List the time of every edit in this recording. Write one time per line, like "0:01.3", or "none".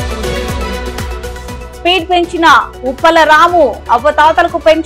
0:01.6